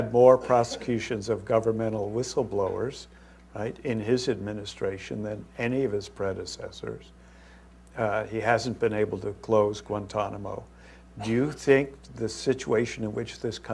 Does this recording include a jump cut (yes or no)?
no